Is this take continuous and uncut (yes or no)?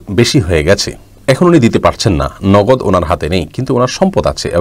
yes